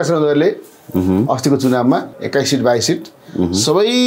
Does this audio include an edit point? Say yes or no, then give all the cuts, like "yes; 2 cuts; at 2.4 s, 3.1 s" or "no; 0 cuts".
yes; 1 cut; at 2.1 s